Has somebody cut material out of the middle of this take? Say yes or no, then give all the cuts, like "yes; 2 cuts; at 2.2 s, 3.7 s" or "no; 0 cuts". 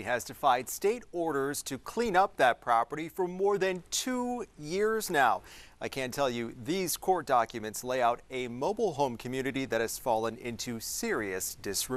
no; 0 cuts